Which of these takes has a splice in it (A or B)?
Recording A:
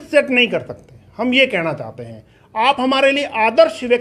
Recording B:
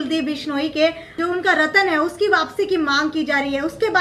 B